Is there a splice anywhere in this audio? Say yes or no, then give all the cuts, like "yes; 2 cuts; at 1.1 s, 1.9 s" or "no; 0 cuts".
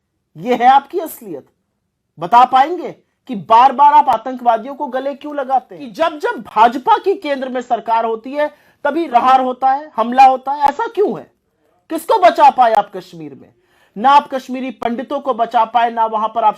yes; 2 cuts; at 5.8 s, 9.1 s